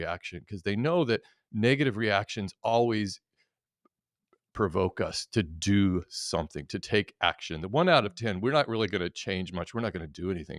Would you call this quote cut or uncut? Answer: uncut